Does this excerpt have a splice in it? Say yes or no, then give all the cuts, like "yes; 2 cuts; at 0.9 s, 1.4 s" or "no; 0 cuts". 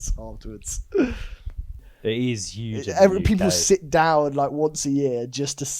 yes; 1 cut; at 1.8 s